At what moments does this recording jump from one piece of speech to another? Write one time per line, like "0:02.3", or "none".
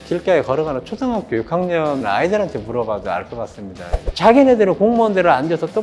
0:04.0

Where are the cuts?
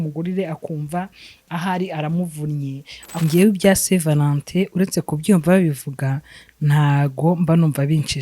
0:03.1

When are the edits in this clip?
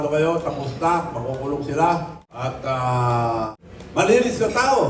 0:02.2
0:03.5

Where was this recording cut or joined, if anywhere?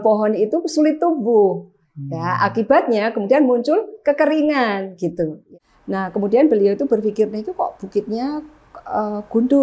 0:05.4

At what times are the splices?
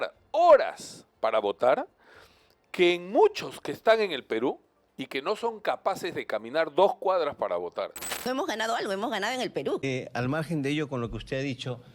0:08.1

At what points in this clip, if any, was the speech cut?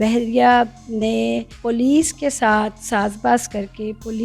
0:01.5

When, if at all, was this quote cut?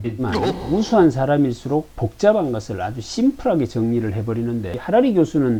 none

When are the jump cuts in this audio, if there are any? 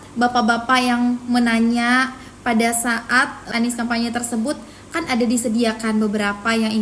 0:03.5

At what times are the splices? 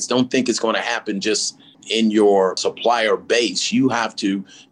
0:01.8
0:02.7

